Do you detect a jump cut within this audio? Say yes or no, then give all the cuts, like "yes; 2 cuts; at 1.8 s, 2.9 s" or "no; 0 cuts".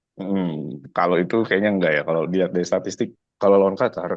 yes; 1 cut; at 3.2 s